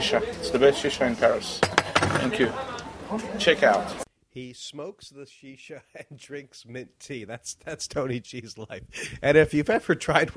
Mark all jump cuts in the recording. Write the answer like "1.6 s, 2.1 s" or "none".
none